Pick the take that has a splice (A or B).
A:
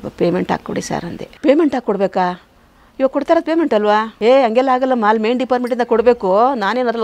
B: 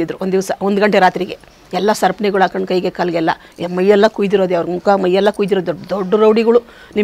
A